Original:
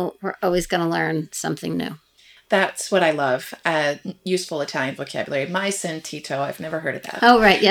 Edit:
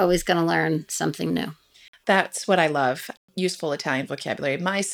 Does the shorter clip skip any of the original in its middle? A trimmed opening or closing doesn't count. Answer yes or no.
yes